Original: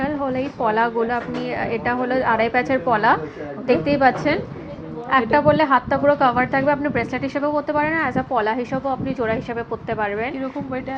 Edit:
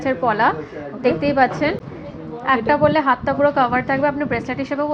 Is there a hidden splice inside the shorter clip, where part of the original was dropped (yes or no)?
no